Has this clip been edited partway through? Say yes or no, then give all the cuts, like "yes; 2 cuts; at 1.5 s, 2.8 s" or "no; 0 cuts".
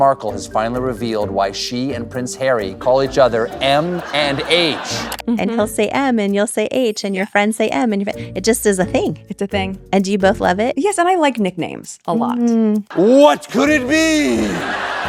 no; 0 cuts